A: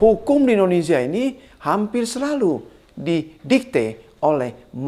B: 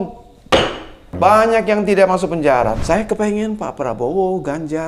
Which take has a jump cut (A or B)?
B